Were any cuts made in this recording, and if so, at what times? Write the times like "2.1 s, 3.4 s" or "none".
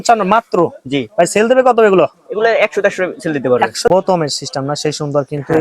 3.9 s